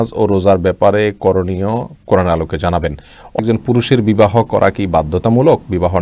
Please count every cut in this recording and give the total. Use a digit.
1